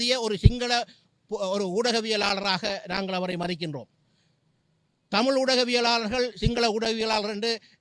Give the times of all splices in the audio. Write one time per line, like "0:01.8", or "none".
none